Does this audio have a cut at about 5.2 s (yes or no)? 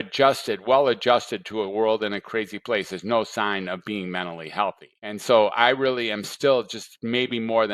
yes